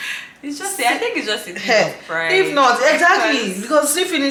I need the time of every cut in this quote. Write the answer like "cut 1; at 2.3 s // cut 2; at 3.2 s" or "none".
none